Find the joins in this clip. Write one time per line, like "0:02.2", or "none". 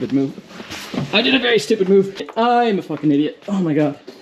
0:02.3